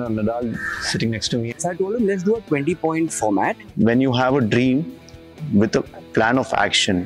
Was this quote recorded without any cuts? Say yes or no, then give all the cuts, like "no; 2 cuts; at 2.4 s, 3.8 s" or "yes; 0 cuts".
no; 2 cuts; at 1.5 s, 3.6 s